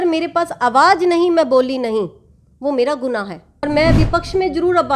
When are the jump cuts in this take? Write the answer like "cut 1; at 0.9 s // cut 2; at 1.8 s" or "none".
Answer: cut 1; at 3.5 s